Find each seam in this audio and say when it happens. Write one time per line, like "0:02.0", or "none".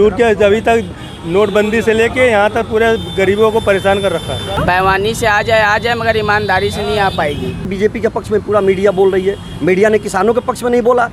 0:04.6
0:07.7